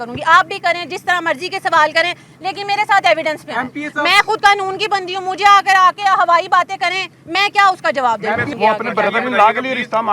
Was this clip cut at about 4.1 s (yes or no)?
no